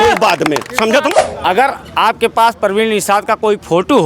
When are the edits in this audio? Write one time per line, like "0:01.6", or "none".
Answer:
0:01.1